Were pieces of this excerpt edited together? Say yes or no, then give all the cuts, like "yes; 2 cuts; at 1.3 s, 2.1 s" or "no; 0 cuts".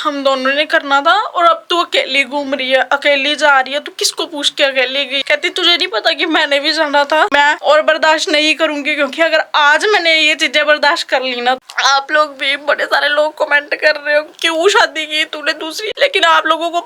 yes; 5 cuts; at 5.2 s, 7.4 s, 11.6 s, 14.4 s, 15.8 s